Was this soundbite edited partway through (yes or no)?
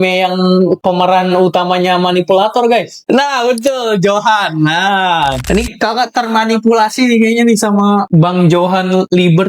yes